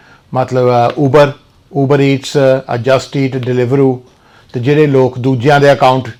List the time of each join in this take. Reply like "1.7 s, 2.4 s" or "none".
none